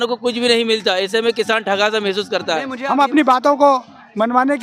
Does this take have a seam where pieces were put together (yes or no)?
yes